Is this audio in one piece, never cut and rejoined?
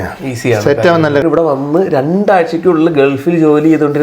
no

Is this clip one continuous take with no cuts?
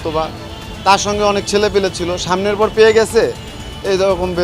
yes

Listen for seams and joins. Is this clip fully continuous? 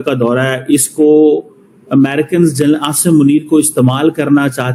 yes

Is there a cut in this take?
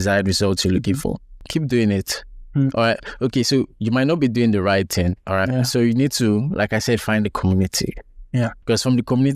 yes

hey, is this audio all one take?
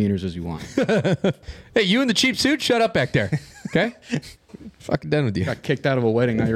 no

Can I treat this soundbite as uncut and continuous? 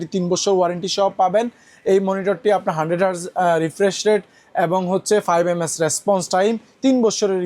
yes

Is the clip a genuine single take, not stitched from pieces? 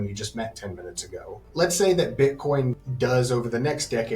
no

